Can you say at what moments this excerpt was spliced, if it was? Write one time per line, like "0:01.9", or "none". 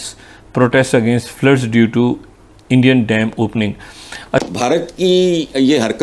0:04.2